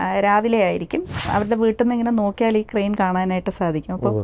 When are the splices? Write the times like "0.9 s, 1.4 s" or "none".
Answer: 1.2 s